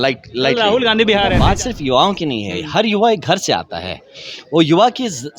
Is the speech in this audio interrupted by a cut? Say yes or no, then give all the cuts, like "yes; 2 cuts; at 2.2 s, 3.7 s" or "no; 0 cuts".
yes; 1 cut; at 1.4 s